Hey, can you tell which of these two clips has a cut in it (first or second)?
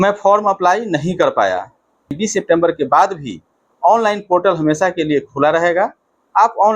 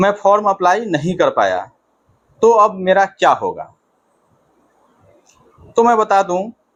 first